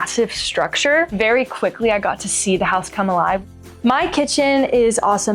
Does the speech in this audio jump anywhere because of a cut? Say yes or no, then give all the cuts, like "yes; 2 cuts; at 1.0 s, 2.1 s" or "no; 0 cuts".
yes; 2 cuts; at 1.2 s, 3.5 s